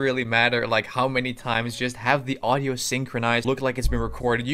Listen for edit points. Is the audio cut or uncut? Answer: cut